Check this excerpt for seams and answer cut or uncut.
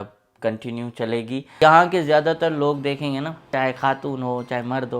cut